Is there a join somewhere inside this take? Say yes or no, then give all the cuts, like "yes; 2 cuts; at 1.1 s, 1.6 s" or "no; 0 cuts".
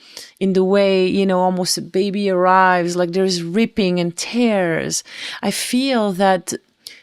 no; 0 cuts